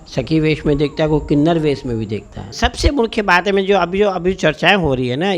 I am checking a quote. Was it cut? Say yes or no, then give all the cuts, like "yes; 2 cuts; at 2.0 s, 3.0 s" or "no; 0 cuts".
yes; 1 cut; at 2.5 s